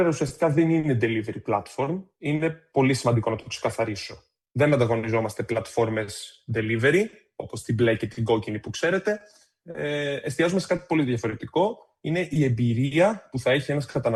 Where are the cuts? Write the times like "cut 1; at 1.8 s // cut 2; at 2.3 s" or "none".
none